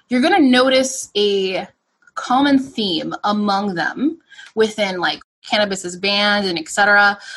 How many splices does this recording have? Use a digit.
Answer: 1